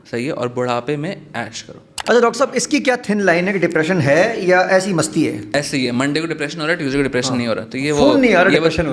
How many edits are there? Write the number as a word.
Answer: two